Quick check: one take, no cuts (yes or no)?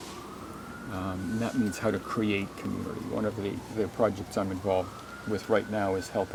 yes